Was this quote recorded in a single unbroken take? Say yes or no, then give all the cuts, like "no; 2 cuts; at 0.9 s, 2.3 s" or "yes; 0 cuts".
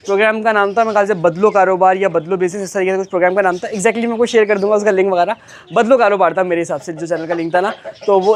yes; 0 cuts